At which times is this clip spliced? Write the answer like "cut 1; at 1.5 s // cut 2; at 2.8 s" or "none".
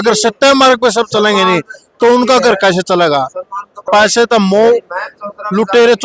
cut 1; at 3.8 s